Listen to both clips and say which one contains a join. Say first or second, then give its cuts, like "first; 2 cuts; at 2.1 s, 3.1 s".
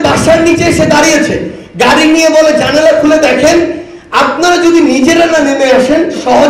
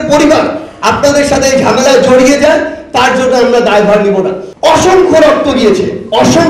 second; 1 cut; at 4.4 s